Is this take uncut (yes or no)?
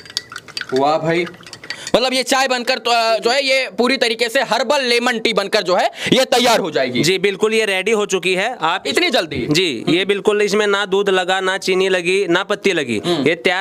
yes